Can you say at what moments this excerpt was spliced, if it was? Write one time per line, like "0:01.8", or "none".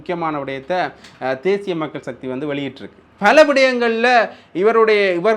0:03.0